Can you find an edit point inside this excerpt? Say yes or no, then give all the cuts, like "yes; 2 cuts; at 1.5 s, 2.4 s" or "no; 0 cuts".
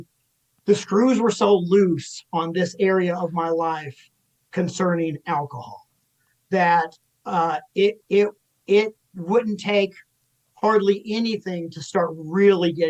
no; 0 cuts